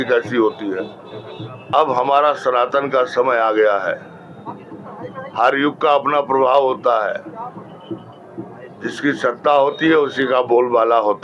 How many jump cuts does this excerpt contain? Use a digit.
1